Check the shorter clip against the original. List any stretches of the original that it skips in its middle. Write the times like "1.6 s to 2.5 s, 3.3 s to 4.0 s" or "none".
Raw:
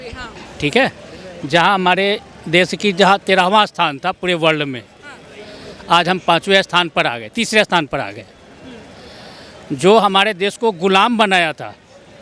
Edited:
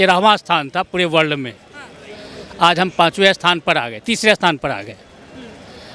none